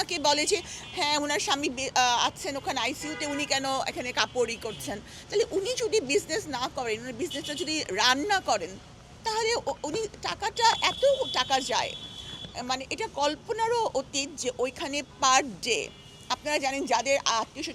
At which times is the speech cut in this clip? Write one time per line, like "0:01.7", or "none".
none